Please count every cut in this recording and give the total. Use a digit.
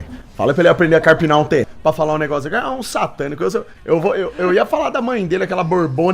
2